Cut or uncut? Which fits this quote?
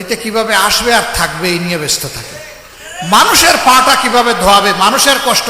uncut